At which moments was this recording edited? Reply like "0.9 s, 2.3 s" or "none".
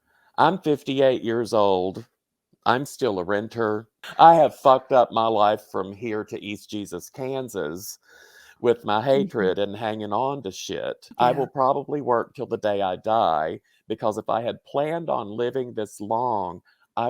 3.9 s, 11.0 s